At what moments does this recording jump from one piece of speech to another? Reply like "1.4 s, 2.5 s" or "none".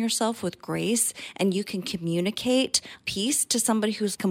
none